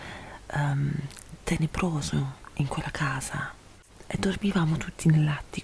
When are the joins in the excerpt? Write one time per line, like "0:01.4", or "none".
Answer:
0:03.8